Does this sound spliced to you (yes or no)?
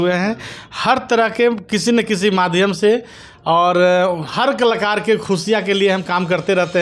no